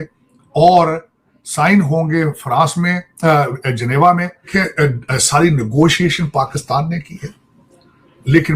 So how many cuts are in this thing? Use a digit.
1